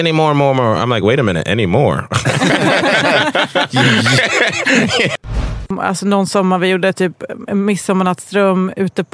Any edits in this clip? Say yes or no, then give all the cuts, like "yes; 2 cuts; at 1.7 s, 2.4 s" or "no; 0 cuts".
yes; 1 cut; at 5.2 s